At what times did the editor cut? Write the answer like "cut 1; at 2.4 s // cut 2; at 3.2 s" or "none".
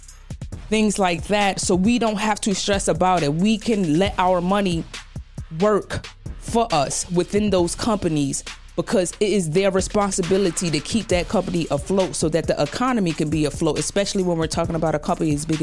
none